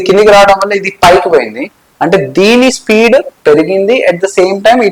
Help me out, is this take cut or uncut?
uncut